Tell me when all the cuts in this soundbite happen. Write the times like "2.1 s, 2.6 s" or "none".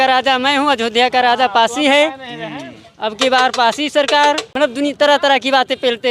4.5 s